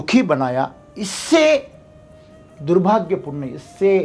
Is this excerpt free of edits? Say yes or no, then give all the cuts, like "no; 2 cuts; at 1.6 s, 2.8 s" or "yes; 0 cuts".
yes; 0 cuts